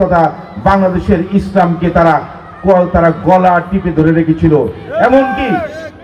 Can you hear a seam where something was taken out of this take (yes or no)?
no